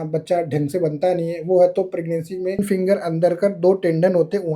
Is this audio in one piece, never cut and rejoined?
no; 1 cut; at 2.6 s

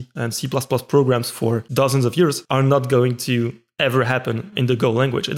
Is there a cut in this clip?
yes; 2 cuts; at 1.7 s, 2.4 s

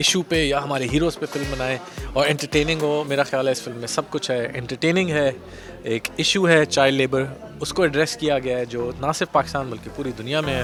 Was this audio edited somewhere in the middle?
no; 0 cuts

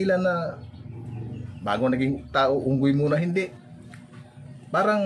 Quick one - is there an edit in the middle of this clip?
yes; 1 cut; at 3.6 s

